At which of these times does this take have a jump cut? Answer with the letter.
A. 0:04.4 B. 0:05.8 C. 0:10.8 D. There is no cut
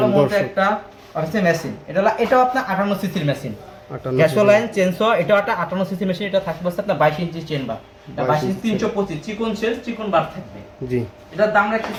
D